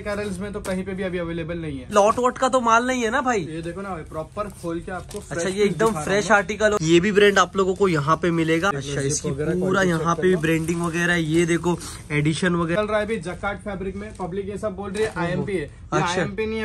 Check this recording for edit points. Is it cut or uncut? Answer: cut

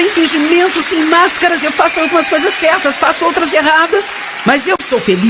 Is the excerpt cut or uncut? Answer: uncut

